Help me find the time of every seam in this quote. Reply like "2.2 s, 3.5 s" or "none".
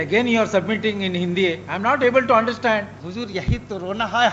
3.0 s